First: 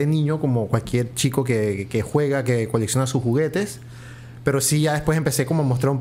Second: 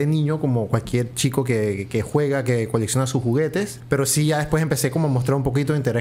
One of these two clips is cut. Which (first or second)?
second